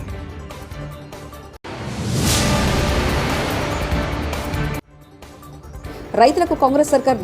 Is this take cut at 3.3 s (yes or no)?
no